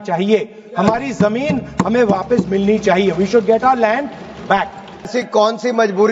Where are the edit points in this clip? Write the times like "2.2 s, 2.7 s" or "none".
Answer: 5.1 s